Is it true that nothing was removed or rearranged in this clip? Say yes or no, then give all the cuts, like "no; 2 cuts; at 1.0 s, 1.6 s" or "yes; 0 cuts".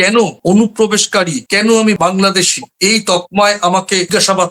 yes; 0 cuts